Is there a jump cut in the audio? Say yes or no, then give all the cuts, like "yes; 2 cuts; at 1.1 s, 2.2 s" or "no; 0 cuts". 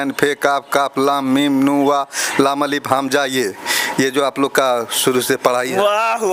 no; 0 cuts